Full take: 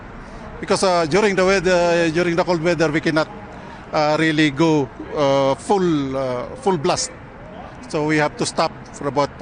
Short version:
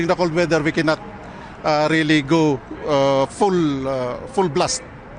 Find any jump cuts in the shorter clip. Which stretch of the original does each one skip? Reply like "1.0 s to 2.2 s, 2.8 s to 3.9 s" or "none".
none